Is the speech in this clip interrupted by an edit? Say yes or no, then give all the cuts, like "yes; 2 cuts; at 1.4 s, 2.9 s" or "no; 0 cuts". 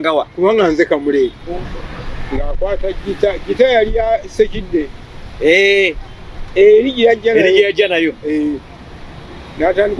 yes; 1 cut; at 1.4 s